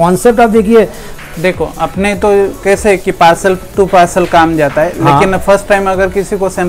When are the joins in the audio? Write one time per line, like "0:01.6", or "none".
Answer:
0:01.1